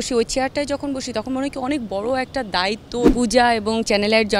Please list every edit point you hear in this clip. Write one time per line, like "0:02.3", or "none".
0:03.1